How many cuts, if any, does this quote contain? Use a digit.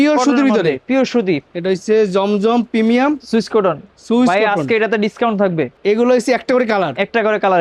2